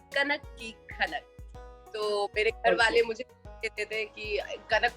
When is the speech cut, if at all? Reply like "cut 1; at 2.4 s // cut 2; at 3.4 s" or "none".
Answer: cut 1; at 1.8 s